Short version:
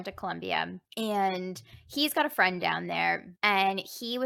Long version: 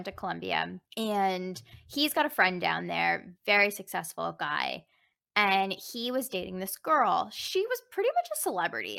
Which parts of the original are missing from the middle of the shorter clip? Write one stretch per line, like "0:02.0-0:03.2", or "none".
0:03.3-0:05.2